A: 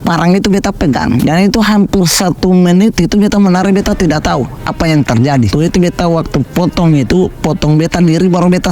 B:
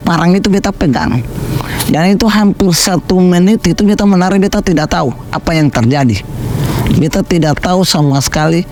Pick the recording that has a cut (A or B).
A